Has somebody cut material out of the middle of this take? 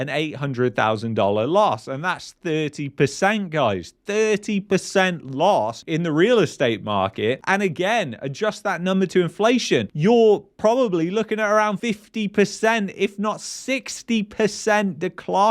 no; 0 cuts

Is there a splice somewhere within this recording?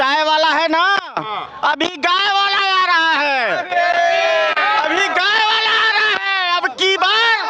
no; 0 cuts

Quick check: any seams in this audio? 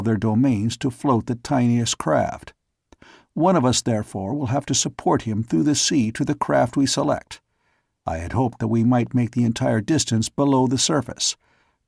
no; 0 cuts

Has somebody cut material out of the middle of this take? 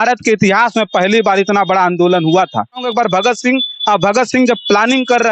yes; 1 cut; at 2.9 s

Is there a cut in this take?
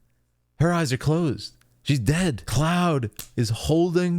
yes; 1 cut; at 2.4 s

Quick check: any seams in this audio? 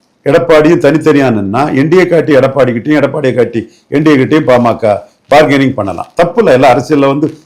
no; 0 cuts

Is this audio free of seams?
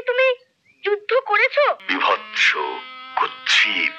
no; 1 cut; at 1.8 s

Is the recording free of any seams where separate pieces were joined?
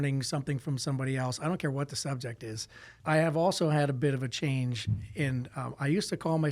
no; 1 cut; at 2.9 s

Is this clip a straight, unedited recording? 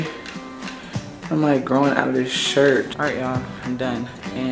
no; 1 cut; at 2.9 s

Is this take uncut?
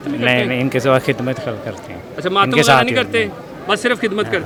yes; 0 cuts

